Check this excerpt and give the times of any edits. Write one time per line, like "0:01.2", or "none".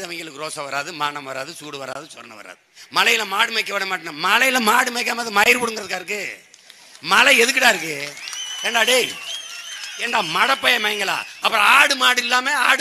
0:02.7
0:11.3